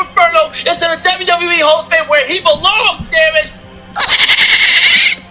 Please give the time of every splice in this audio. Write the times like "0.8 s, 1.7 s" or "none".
none